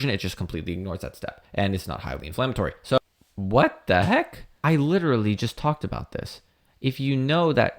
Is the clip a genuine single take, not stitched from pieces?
no; 2 cuts; at 3.0 s, 4.6 s

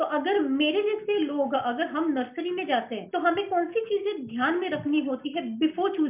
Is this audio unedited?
yes; 0 cuts

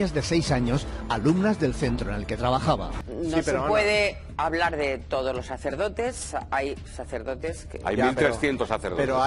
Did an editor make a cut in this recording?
yes; 1 cut; at 3.1 s

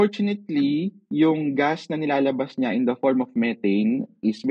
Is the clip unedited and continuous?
no; 1 cut; at 1.0 s

